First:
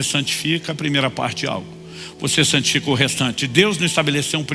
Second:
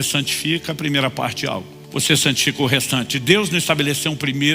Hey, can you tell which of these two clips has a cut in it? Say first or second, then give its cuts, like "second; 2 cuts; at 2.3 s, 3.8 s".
second; 1 cut; at 1.8 s